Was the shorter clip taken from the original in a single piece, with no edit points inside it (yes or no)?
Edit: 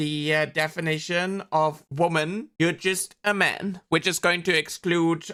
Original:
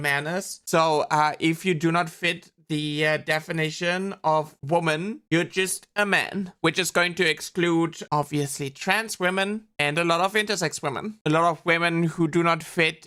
yes